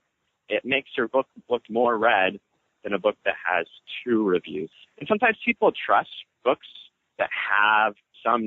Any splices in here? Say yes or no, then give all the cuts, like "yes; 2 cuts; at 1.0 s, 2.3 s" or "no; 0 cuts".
yes; 2 cuts; at 4.7 s, 6.2 s